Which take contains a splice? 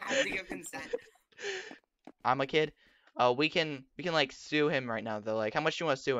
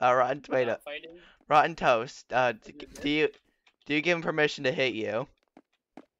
first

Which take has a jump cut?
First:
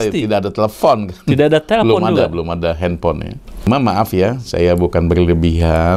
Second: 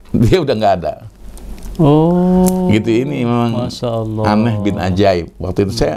first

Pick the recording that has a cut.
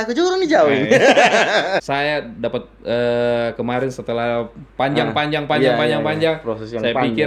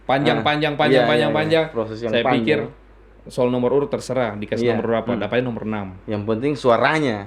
first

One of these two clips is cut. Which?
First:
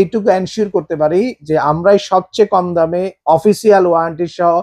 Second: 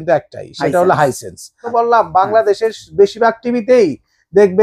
second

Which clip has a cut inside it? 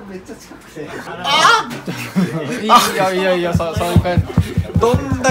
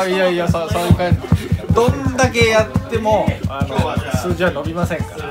first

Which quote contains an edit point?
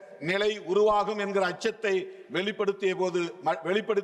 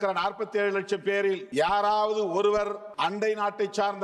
second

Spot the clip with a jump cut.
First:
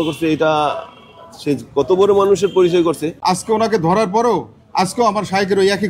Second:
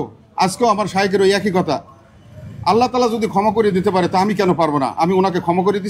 first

